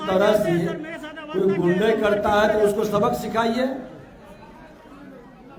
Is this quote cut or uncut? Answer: uncut